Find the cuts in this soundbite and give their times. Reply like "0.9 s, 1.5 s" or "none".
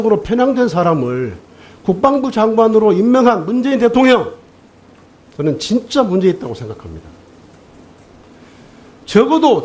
1.0 s